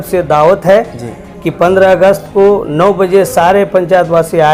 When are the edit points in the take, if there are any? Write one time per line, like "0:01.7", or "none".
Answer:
none